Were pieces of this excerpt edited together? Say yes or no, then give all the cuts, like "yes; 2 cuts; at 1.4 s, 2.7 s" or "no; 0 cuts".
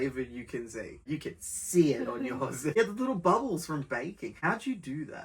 yes; 3 cuts; at 1.1 s, 2.8 s, 4.4 s